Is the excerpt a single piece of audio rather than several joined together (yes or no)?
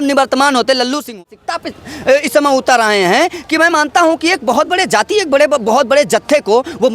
no